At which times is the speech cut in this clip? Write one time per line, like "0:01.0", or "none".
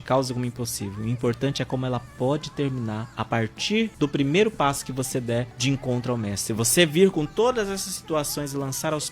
0:03.9
0:05.5